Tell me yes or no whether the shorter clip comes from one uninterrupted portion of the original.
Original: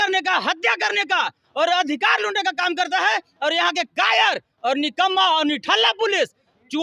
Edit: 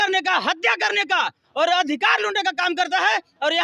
yes